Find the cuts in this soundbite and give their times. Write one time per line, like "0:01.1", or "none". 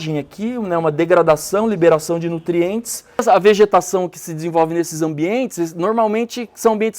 0:03.2